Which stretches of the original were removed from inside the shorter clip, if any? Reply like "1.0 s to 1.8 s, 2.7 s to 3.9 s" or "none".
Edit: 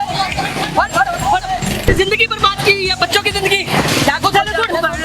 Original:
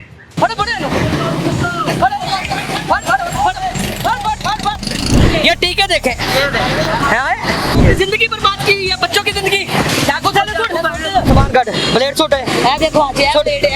4.0 s to 7.9 s